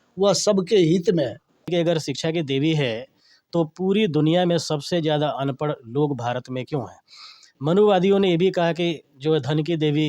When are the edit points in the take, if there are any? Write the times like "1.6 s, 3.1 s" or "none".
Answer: 1.7 s